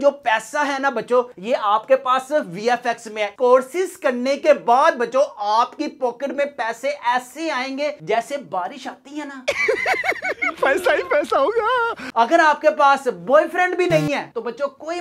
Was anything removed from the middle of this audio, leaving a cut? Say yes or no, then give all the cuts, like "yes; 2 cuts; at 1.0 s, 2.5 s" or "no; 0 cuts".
yes; 2 cuts; at 9.4 s, 12.0 s